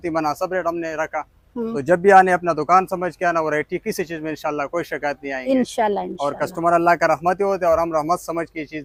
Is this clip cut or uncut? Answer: uncut